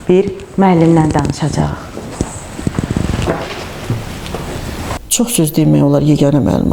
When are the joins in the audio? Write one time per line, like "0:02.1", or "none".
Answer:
0:05.0